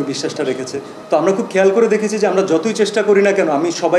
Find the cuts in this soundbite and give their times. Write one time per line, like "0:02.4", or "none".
0:01.0